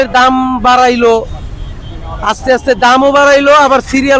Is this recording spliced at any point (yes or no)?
no